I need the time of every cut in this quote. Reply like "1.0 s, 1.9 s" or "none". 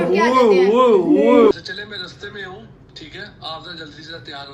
1.5 s